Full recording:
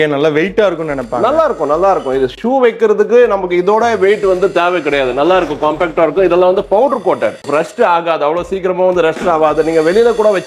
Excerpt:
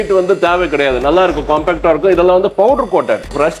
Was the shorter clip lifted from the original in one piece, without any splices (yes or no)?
yes